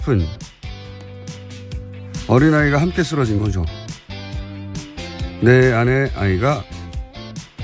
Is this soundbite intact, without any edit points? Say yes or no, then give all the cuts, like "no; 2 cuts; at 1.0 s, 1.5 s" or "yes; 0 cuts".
no; 1 cut; at 6.1 s